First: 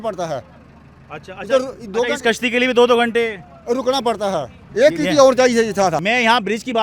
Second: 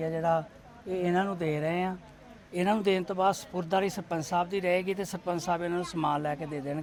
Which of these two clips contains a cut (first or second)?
first